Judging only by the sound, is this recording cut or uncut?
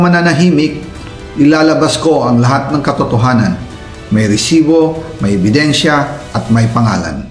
uncut